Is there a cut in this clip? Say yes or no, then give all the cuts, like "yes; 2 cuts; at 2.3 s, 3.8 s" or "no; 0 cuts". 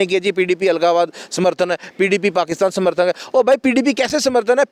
no; 0 cuts